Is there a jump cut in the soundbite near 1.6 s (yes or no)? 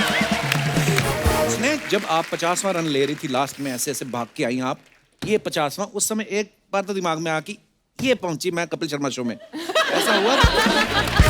yes